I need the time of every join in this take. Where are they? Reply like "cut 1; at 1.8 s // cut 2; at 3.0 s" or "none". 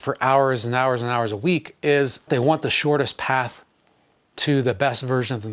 cut 1; at 2.3 s

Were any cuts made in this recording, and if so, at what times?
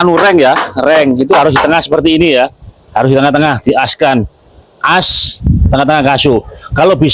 none

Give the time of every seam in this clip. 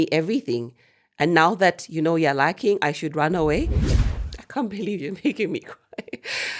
cut 1; at 3.8 s

